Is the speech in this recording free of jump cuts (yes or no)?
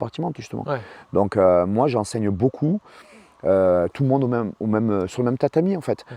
yes